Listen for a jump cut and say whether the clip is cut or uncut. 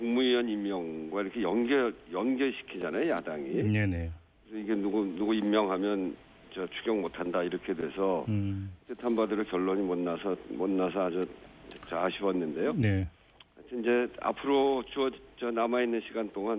cut